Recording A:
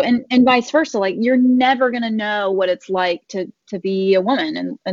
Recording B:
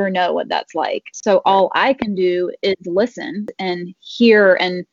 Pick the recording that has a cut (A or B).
B